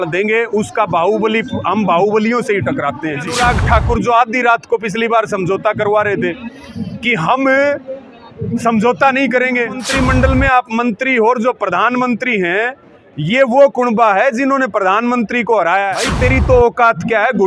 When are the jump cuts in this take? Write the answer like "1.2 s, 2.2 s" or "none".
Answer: 3.3 s, 9.9 s, 16.0 s